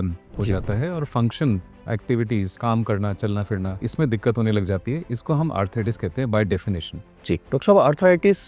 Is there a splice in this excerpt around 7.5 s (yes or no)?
yes